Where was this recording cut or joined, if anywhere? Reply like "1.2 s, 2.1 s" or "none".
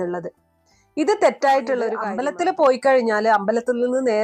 2.1 s